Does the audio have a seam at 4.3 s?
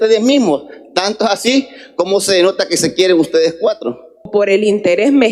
yes; 1 cut; at 4.3 s

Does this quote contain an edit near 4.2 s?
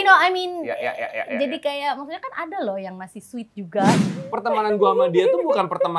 yes; 1 cut; at 4.2 s

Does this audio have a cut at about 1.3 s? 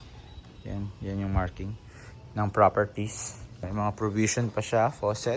no; 1 cut; at 3.6 s

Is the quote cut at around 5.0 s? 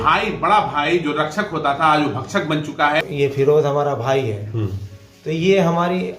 no; 1 cut; at 3.0 s

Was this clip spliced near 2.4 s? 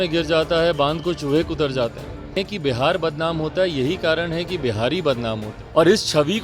yes; 2 cuts; at 2.4 s, 5.5 s

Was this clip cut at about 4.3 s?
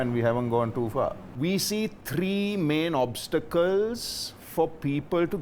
no; 1 cut; at 1.2 s

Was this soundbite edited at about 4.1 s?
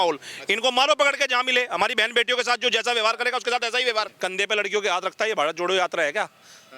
yes; 1 cut; at 4.1 s

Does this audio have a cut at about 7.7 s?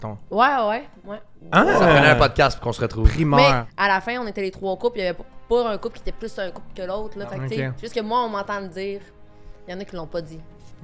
no; 1 cut; at 3.7 s

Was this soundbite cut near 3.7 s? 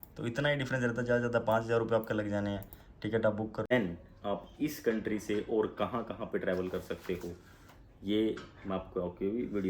yes; 1 cut; at 3.7 s

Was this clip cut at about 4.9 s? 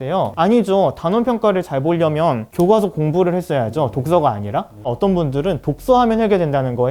yes; 1 cut; at 4.9 s

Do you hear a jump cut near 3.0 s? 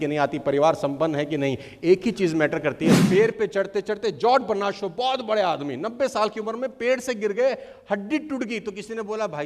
yes; 1 cut; at 3.0 s

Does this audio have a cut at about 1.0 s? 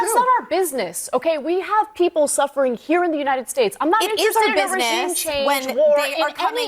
yes; 1 cut; at 1.0 s

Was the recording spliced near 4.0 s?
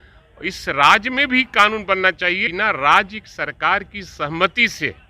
no; 1 cut; at 2.5 s

